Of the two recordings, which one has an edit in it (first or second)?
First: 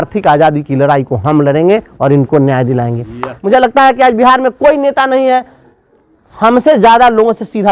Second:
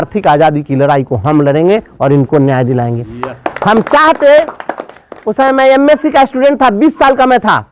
first